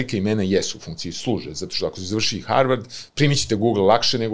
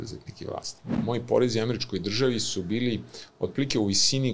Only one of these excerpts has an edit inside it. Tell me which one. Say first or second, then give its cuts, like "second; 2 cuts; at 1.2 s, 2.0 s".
second; 1 cut; at 0.9 s